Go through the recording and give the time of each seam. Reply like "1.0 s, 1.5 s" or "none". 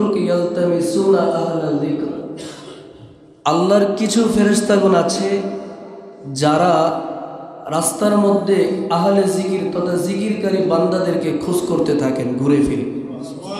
none